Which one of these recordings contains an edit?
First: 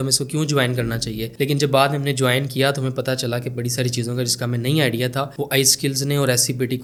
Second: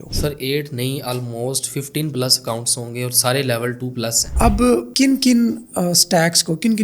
second; 1 cut; at 4.3 s

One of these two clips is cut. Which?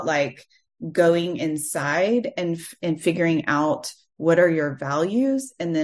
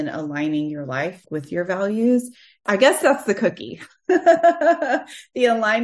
second; 2 cuts; at 1.2 s, 2.6 s

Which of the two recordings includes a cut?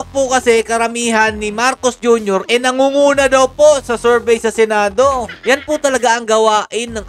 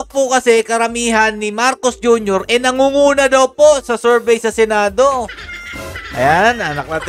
first; 1 cut; at 5.3 s

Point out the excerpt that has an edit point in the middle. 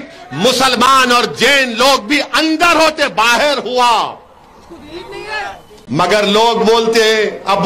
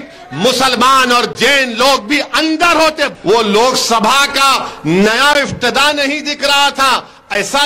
second; 1 cut; at 3.1 s

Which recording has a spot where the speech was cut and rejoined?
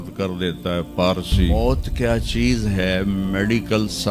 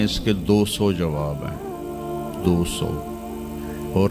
first; 1 cut; at 1.5 s

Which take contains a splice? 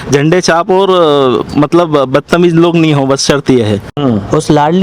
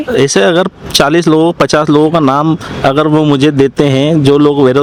first; 1 cut; at 3.9 s

